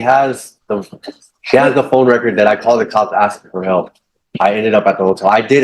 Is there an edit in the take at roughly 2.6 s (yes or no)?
yes